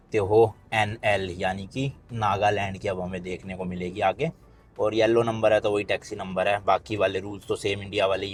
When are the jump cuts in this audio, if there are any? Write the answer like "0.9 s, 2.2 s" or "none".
none